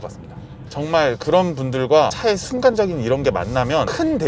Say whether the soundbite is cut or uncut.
uncut